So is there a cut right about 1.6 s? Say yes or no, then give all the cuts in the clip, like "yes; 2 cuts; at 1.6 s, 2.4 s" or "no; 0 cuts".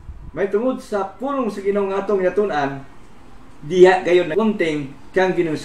no; 1 cut; at 4.3 s